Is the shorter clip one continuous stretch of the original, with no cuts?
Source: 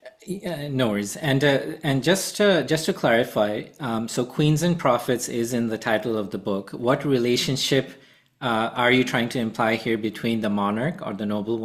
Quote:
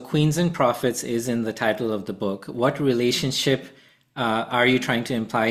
yes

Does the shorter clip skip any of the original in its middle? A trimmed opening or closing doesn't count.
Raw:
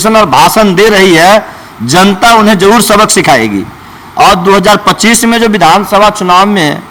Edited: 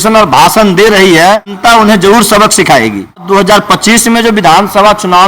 yes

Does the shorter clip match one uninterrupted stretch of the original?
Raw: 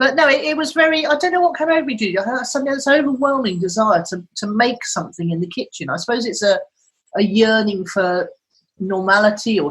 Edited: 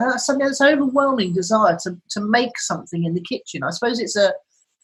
yes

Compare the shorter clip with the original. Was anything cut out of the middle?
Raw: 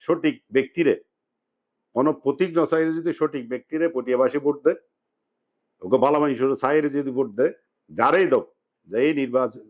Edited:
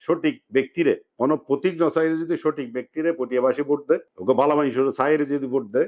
yes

